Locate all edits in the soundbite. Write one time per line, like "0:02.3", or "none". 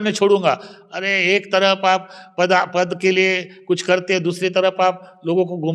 none

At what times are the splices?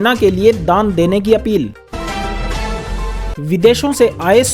0:01.8
0:03.3

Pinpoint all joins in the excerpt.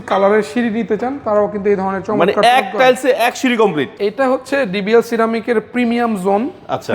0:03.9

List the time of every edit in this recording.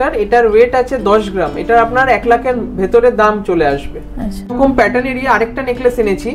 none

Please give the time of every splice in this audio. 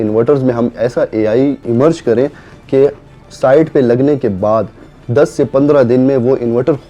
0:01.6

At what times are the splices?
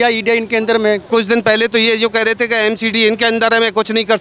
0:01.0

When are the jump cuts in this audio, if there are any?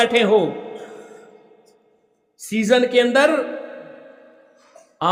none

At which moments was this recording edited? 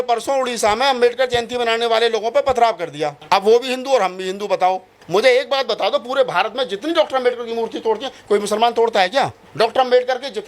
0:03.1
0:05.0
0:09.4

